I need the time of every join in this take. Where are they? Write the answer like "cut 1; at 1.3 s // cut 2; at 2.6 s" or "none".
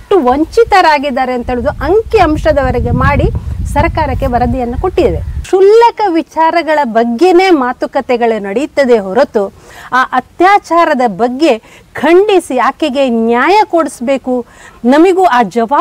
cut 1; at 5.4 s